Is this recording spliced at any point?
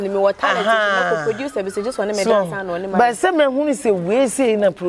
no; 0 cuts

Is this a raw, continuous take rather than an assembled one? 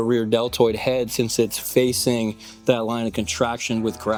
yes; 0 cuts

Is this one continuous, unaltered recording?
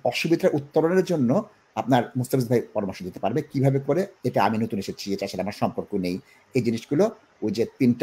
yes; 0 cuts

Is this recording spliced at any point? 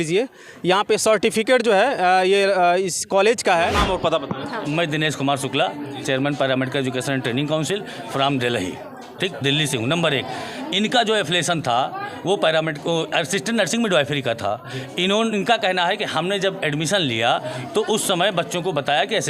yes; 1 cut; at 3.8 s

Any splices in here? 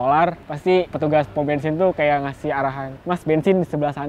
yes; 1 cut; at 2.9 s

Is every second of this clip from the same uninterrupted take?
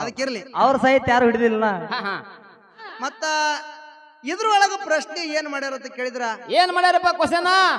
no; 1 cut; at 2.8 s

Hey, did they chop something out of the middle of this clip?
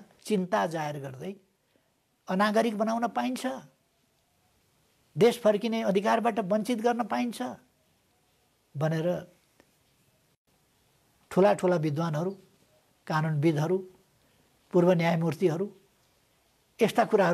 no; 0 cuts

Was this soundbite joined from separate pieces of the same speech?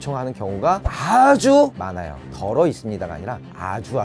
no; 0 cuts

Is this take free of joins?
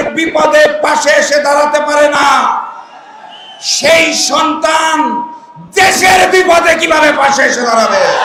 yes; 0 cuts

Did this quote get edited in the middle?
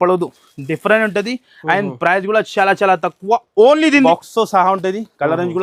yes; 1 cut; at 4.1 s

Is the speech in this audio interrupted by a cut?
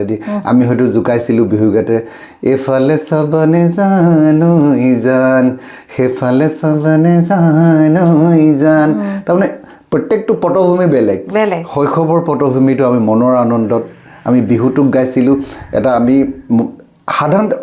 no; 0 cuts

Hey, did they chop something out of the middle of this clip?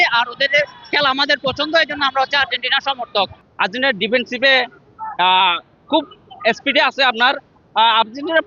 yes; 1 cut; at 3.4 s

